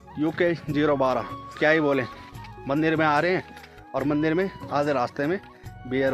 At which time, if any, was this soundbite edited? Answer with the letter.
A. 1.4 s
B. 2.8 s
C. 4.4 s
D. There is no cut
A